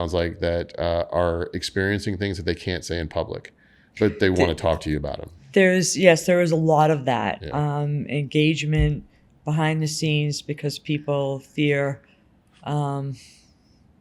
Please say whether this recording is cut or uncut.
uncut